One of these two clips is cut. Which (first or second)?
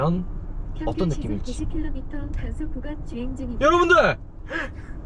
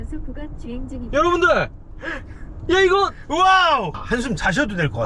second